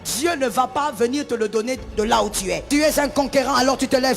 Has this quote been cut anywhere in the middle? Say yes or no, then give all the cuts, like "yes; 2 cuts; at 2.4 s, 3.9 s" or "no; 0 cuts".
yes; 1 cut; at 2.6 s